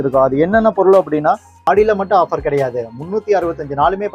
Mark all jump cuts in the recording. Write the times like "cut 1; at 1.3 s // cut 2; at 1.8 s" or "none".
cut 1; at 1.7 s